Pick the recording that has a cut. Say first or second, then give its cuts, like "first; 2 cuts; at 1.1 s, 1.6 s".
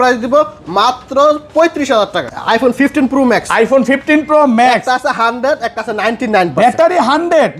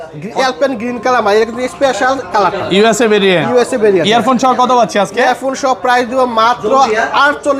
first; 1 cut; at 2.2 s